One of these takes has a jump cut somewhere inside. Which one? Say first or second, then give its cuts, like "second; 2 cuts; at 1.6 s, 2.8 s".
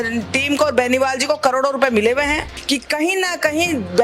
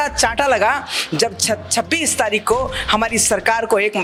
first; 1 cut; at 2.5 s